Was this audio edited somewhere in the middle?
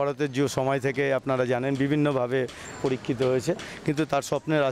no; 0 cuts

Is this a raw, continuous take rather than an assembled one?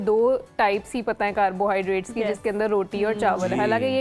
yes; 0 cuts

